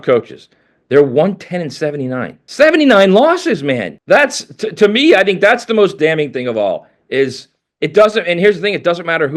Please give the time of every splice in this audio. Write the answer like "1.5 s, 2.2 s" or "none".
2.4 s, 3.9 s